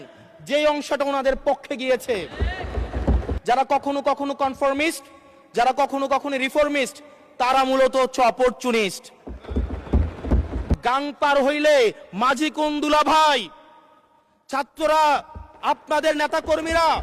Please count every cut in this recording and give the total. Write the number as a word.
two